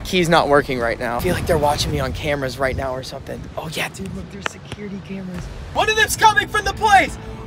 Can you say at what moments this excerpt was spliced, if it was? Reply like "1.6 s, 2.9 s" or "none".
1.1 s, 5.5 s